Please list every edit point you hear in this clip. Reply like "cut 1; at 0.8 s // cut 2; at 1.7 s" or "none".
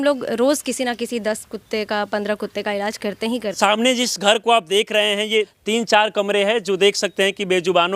cut 1; at 3.6 s // cut 2; at 5.5 s